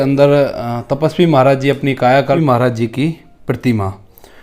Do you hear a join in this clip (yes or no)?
yes